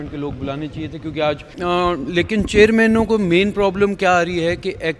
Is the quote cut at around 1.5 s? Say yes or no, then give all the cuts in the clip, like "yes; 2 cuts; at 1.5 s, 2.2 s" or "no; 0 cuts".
yes; 1 cut; at 1.5 s